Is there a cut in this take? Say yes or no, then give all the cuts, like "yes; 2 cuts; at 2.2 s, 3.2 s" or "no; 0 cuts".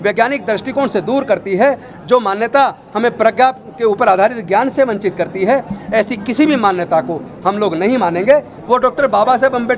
yes; 1 cut; at 8.5 s